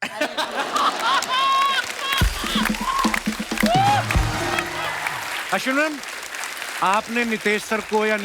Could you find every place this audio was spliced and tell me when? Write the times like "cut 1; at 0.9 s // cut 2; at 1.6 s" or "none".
cut 1; at 5.2 s